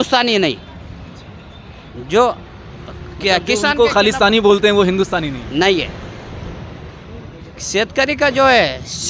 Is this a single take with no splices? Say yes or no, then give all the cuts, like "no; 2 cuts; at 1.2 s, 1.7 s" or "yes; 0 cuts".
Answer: yes; 0 cuts